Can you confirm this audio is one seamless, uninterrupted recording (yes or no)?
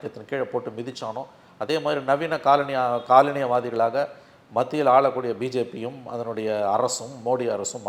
yes